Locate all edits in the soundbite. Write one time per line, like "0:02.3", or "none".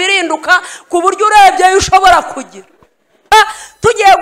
0:03.2